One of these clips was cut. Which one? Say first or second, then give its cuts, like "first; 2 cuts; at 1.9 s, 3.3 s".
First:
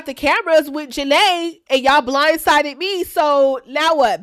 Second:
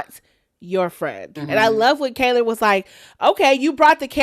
second; 1 cut; at 1.3 s